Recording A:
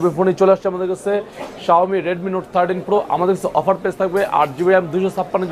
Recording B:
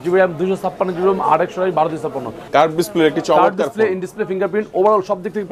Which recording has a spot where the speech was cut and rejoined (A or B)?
B